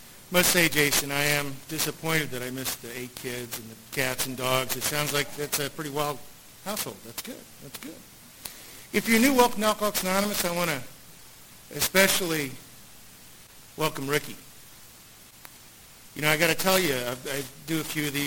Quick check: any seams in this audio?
no; 0 cuts

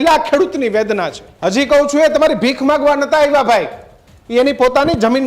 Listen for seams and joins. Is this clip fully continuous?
no; 1 cut; at 1.2 s

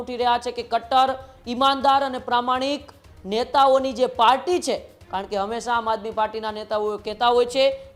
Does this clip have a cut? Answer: no; 0 cuts

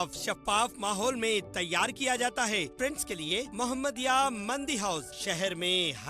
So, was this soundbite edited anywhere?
yes; 1 cut; at 2.7 s

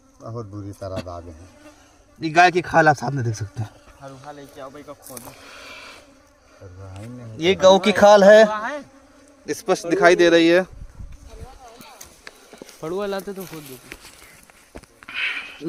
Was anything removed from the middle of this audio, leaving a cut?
no; 0 cuts

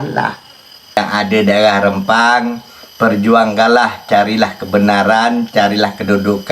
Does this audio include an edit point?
yes; 1 cut; at 1.0 s

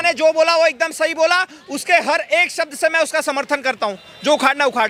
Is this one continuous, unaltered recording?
yes; 0 cuts

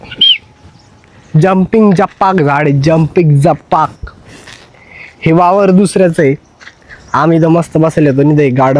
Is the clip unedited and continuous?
yes; 0 cuts

